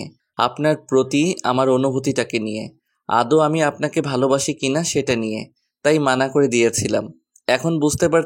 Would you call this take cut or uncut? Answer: uncut